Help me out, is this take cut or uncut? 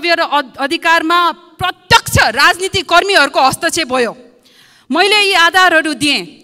uncut